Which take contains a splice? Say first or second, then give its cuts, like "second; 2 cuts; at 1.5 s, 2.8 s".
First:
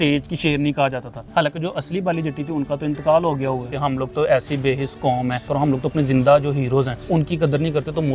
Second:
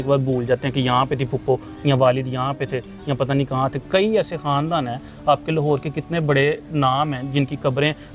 first; 4 cuts; at 1.1 s, 3.7 s, 5.5 s, 7.0 s